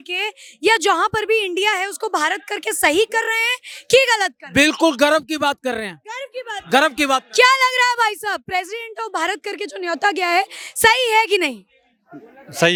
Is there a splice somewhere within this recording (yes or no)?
no